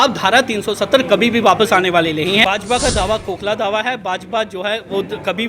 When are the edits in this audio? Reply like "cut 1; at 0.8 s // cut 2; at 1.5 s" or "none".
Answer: cut 1; at 2.4 s